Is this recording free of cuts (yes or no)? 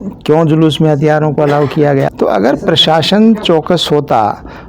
no